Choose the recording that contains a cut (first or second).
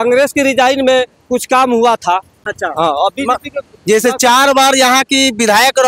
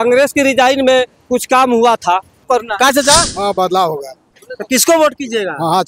second